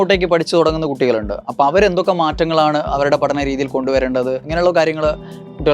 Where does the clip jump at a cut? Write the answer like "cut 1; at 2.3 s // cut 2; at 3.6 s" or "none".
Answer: cut 1; at 4.4 s